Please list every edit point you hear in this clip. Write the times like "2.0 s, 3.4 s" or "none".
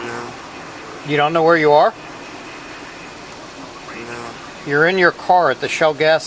none